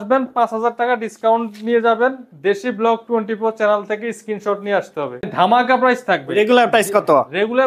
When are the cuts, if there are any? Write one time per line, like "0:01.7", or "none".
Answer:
0:05.3

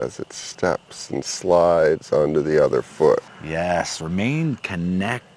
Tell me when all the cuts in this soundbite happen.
0:03.4

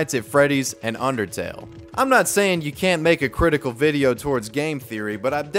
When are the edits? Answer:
none

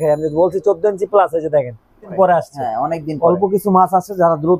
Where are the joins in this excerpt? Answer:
0:02.1

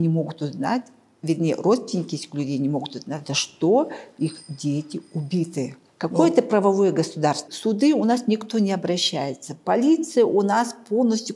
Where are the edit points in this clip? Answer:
0:05.8
0:07.5

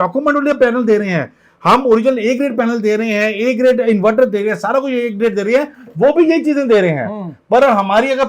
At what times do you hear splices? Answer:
none

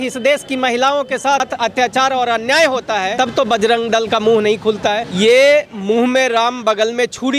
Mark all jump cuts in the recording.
0:01.5
0:03.1
0:05.1

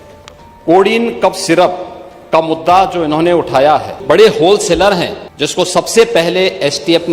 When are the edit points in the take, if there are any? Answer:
0:04.0
0:05.2

